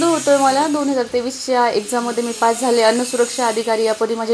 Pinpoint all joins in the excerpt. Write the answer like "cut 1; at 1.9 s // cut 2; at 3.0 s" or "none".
none

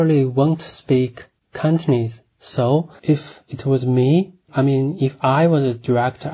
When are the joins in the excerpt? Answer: none

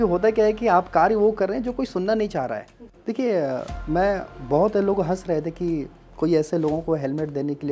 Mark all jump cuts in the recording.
cut 1; at 2.8 s

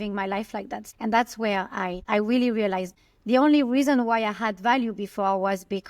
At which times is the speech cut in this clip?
cut 1; at 0.8 s // cut 2; at 2.0 s // cut 3; at 2.9 s

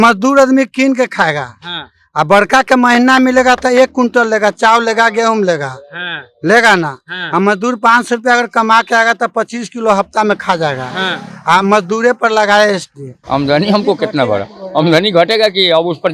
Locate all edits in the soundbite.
cut 1; at 13.1 s

